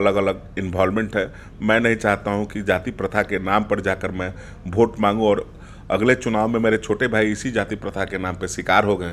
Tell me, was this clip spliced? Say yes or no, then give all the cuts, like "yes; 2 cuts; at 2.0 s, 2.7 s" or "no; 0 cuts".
no; 0 cuts